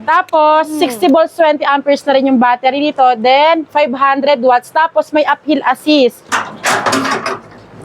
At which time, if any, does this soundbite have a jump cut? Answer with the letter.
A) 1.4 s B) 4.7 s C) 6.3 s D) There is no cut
C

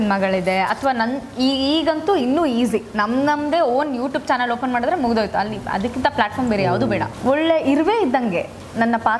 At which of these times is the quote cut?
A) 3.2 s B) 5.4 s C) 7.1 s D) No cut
C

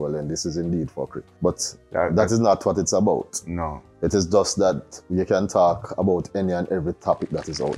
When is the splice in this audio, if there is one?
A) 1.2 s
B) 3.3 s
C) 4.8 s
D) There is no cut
A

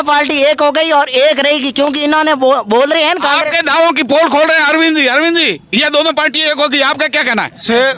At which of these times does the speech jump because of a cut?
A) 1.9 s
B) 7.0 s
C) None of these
C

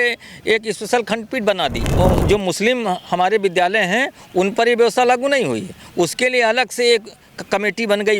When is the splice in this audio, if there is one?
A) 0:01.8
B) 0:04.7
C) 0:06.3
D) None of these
A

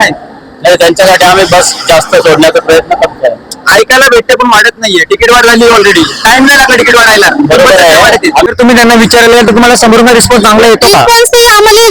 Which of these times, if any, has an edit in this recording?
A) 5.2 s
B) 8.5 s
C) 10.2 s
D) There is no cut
B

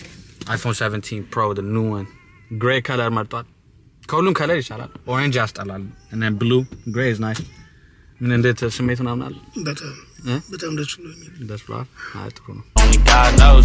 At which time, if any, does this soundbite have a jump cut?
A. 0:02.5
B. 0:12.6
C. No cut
B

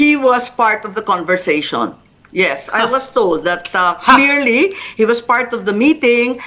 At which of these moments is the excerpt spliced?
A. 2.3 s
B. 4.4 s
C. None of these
C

